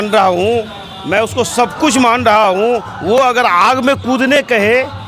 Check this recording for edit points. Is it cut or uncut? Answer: uncut